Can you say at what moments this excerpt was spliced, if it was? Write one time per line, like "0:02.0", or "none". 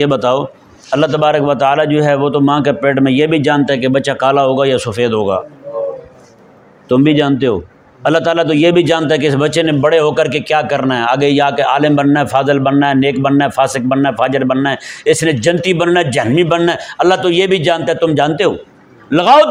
none